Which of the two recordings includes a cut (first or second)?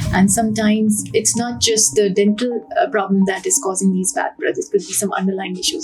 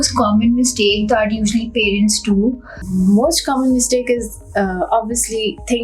second